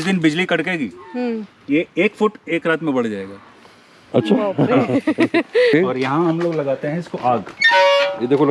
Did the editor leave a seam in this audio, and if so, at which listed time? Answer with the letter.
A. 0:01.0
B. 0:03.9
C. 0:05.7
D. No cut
C